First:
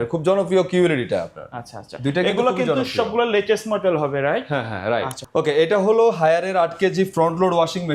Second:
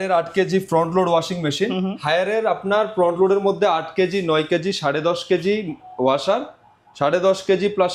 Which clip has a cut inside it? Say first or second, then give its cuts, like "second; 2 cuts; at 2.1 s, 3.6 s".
first; 1 cut; at 5.2 s